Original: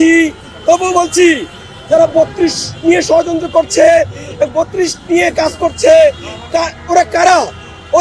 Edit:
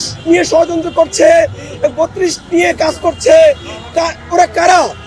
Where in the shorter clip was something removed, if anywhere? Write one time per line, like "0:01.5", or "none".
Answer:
none

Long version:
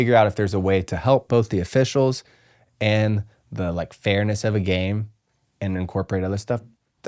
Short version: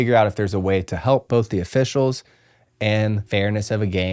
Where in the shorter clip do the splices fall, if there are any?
0:03.2

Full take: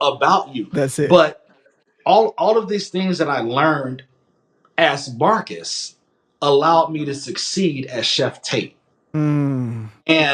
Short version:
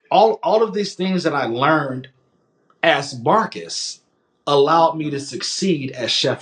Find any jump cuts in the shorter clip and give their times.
none

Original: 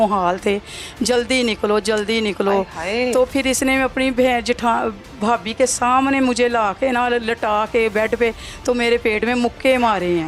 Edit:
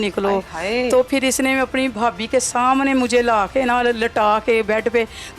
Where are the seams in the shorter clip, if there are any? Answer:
0:01.9

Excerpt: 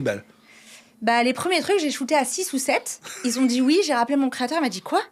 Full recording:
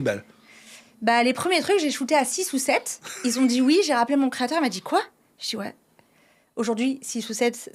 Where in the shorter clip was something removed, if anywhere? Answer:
none

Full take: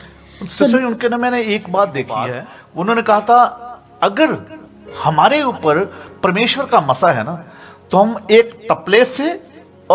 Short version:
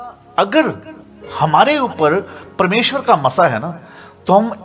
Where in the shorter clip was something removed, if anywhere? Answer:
none

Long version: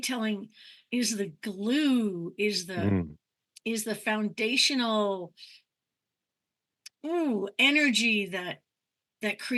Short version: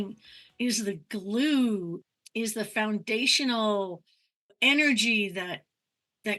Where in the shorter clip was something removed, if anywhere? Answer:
0:01.9
0:04.6

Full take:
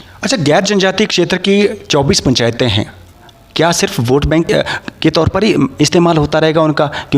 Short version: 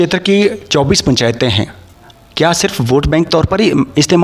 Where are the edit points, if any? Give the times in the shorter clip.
0:03.3

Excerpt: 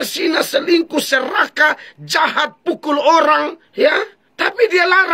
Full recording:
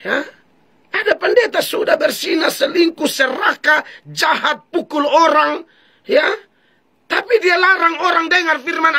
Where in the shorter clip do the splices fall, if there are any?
0:03.8

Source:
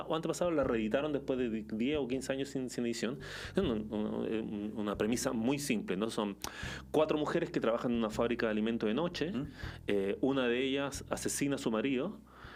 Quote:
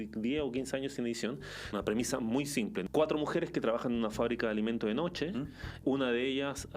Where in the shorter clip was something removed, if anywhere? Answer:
0:01.3
0:02.8
0:05.8

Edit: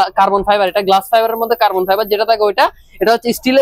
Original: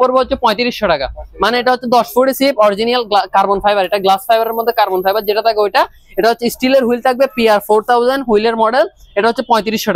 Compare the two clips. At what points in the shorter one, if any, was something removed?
none

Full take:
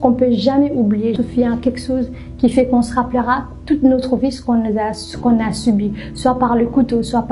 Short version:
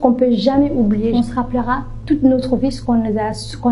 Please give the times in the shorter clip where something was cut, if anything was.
0:01.1

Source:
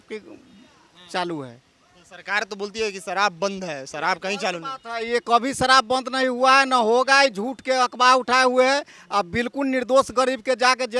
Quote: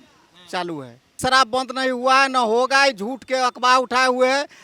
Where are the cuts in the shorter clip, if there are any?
0:01.2

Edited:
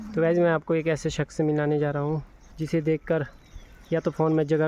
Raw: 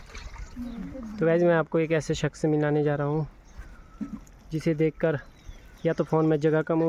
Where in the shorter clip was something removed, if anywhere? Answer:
0:02.4

